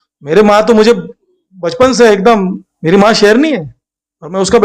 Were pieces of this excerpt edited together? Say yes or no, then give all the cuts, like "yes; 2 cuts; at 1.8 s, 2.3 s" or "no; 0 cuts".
yes; 1 cut; at 2.7 s